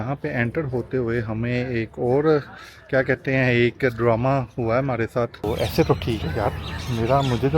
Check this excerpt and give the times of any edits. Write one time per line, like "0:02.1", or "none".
0:05.5